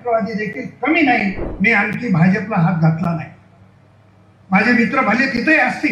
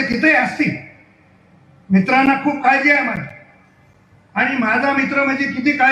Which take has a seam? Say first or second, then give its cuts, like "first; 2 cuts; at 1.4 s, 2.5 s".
first; 1 cut; at 1.5 s